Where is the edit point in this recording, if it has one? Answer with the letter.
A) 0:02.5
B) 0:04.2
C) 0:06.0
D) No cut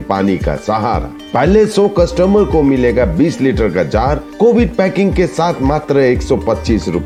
D